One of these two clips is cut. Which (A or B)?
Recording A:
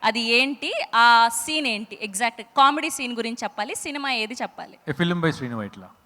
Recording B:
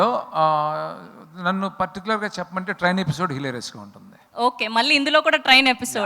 A